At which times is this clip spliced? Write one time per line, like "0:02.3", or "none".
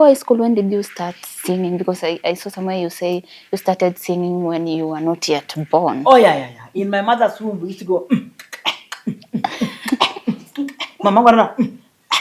none